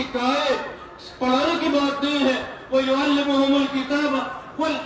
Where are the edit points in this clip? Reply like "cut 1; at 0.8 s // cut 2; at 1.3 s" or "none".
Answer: none